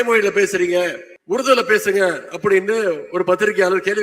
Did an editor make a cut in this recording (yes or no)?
yes